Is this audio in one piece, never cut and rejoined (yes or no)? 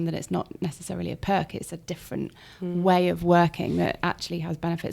yes